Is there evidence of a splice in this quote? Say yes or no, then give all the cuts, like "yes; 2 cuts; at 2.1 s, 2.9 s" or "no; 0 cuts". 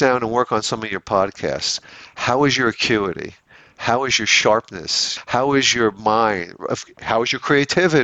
yes; 1 cut; at 5.2 s